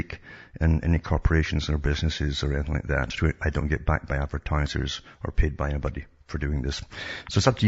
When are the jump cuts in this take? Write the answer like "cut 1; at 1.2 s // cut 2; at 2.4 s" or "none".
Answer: cut 1; at 3.8 s